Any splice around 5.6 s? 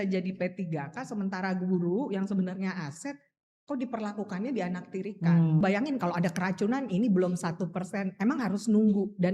yes; 1 cut; at 5.6 s

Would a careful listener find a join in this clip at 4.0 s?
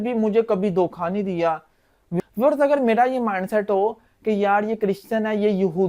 no; 1 cut; at 2.1 s

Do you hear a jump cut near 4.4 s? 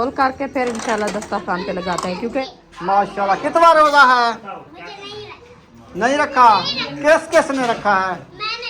no; 1 cut; at 2.6 s

